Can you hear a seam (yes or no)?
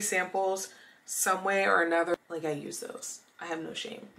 yes